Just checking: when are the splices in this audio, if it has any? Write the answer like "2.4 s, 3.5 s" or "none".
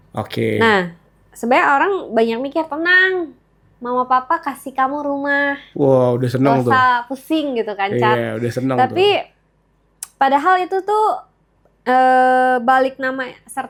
none